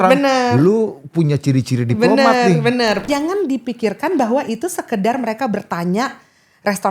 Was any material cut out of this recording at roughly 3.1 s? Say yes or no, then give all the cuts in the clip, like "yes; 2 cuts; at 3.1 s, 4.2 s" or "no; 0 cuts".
yes; 1 cut; at 3.1 s